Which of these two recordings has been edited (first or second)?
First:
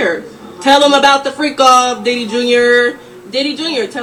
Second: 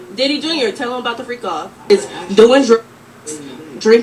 second